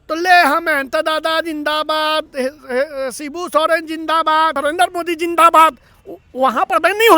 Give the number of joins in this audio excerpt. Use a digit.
1